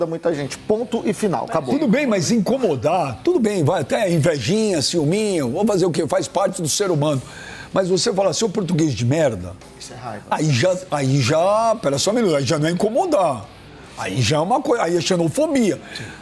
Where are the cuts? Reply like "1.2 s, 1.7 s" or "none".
none